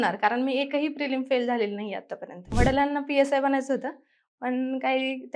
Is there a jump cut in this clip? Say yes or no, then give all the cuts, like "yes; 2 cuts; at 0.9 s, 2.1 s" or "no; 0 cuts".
yes; 1 cut; at 2.5 s